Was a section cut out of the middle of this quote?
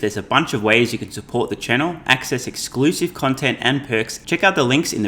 yes; 1 cut; at 4.2 s

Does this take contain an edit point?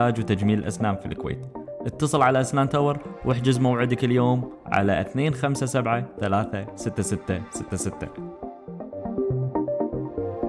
yes; 1 cut; at 7.9 s

